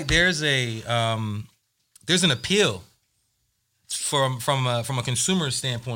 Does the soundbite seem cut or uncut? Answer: uncut